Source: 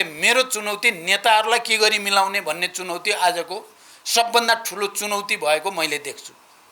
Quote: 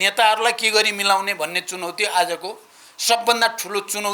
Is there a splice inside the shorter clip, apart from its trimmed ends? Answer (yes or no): no